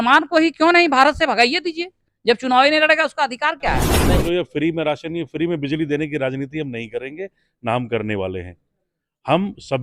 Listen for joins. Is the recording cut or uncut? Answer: cut